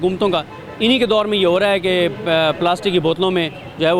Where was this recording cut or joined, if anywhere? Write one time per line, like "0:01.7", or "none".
none